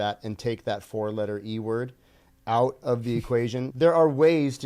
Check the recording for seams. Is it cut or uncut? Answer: cut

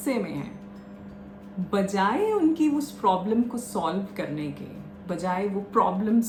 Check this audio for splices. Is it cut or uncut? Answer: uncut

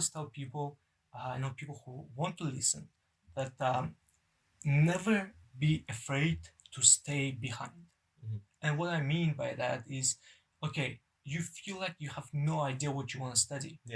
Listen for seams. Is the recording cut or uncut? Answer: uncut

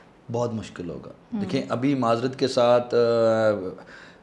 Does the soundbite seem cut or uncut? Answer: uncut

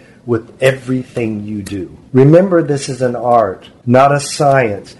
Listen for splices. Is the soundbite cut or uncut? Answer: cut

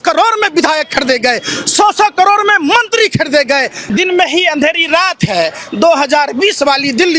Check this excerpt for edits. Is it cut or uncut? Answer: cut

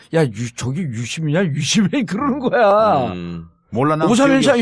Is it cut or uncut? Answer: cut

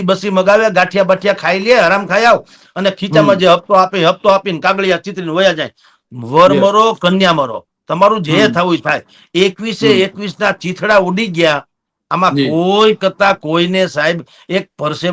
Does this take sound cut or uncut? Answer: uncut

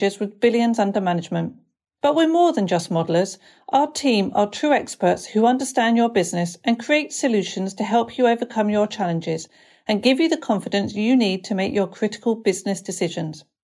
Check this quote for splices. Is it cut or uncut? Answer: uncut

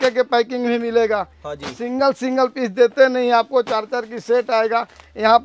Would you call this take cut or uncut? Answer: uncut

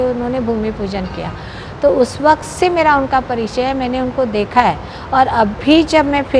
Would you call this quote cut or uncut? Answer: uncut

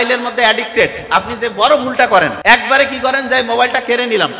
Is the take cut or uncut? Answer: cut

